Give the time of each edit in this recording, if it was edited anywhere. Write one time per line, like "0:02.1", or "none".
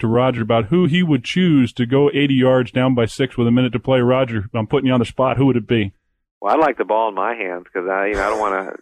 none